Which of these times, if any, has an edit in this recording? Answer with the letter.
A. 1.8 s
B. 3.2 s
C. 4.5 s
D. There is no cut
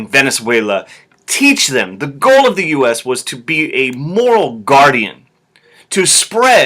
C